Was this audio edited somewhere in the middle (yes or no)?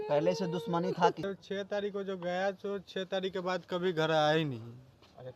yes